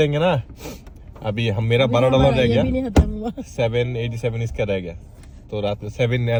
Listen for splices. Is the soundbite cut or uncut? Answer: uncut